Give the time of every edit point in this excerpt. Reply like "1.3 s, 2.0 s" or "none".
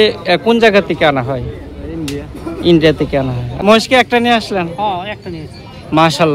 3.5 s